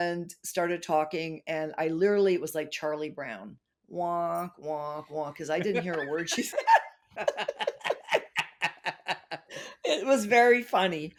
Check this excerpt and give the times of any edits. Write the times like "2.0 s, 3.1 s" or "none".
none